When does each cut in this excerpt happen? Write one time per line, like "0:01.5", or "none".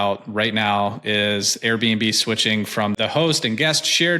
0:03.0